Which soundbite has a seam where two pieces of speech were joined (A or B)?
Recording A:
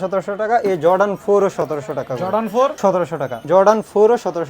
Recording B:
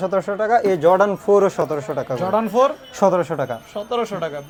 A